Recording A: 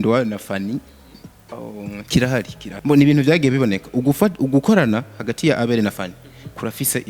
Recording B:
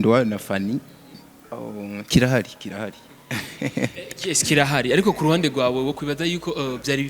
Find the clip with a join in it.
A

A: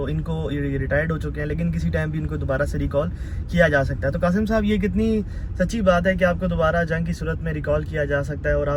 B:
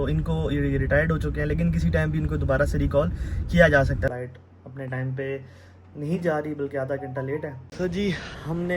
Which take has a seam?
B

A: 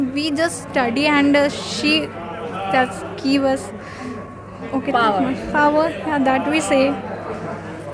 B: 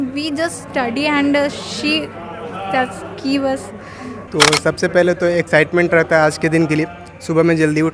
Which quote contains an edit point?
B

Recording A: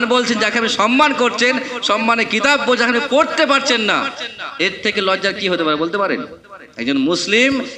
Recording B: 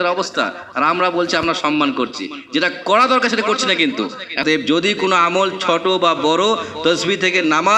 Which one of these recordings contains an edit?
B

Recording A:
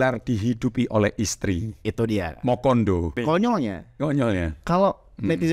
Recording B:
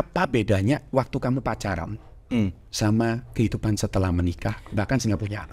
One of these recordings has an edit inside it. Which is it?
A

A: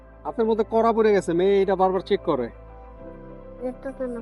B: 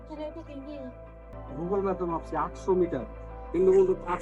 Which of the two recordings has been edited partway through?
B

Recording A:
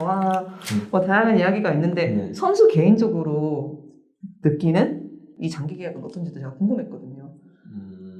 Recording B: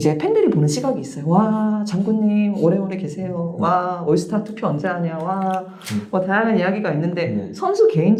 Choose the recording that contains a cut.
A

